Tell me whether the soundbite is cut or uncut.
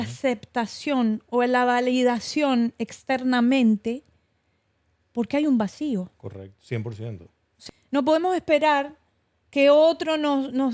cut